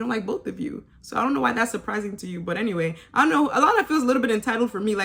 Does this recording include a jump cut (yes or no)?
no